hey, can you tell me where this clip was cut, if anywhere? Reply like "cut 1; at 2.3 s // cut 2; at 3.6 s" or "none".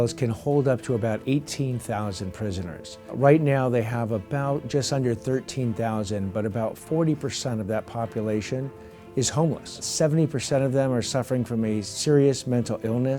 cut 1; at 3.1 s // cut 2; at 6.8 s // cut 3; at 9.9 s // cut 4; at 11.9 s